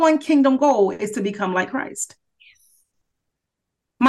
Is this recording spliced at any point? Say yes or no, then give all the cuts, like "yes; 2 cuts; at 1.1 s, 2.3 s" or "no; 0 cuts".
no; 0 cuts